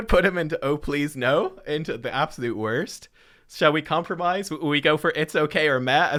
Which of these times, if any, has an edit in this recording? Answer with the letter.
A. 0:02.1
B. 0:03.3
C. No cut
C